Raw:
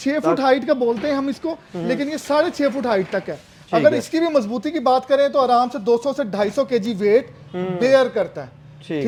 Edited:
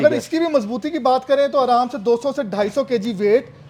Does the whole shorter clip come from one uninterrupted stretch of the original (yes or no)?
yes